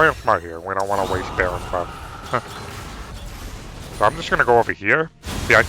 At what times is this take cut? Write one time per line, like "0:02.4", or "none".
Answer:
0:03.1